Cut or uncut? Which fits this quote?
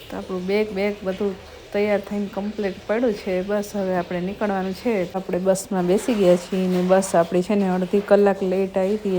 cut